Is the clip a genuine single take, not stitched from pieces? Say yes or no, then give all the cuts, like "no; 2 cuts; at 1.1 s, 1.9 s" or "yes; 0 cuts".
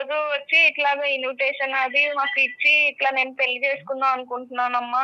yes; 0 cuts